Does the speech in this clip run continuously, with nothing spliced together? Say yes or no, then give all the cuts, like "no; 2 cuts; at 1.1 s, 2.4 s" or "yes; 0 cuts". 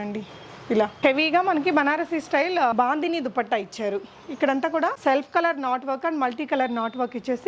no; 3 cuts; at 0.9 s, 2.7 s, 5.0 s